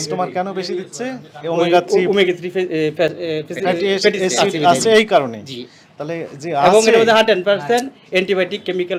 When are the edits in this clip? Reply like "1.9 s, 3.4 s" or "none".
none

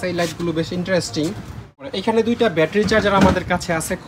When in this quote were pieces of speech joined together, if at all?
1.9 s

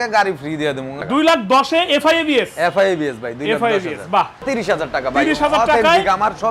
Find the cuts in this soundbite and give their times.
1.0 s, 4.5 s

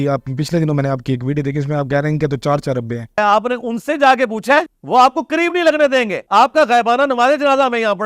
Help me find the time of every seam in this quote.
3.2 s, 4.8 s, 6.2 s

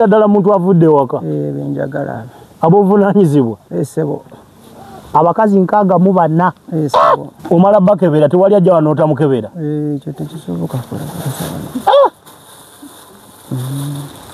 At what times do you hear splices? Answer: 7.3 s

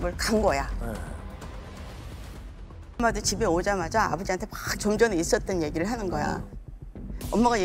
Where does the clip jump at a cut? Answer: 3.0 s

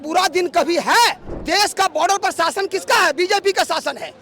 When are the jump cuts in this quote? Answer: 1.3 s

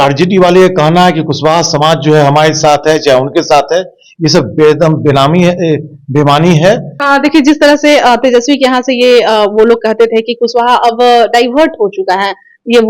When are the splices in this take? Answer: 6.9 s

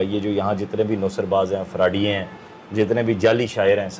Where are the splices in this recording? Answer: none

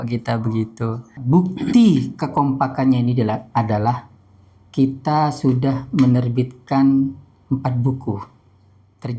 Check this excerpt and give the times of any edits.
1.2 s

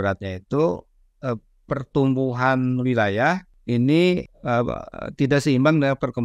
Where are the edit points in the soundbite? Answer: 3.5 s, 4.3 s

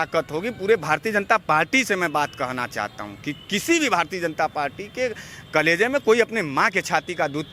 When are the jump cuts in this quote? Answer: none

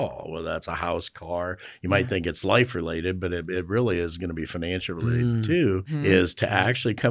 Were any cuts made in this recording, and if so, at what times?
5.9 s

